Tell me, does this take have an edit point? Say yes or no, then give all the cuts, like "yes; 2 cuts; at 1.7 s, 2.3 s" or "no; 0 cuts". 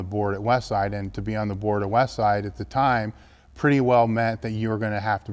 no; 0 cuts